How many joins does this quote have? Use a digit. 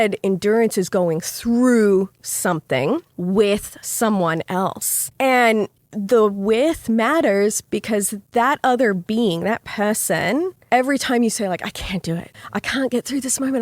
3